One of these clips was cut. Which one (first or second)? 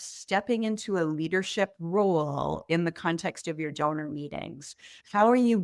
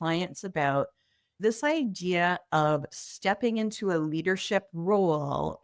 second